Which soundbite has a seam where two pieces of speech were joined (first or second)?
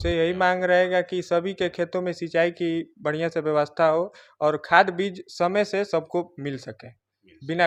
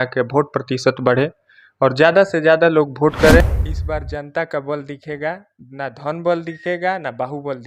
second